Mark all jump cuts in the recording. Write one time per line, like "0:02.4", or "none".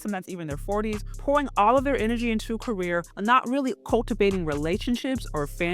0:01.1
0:03.1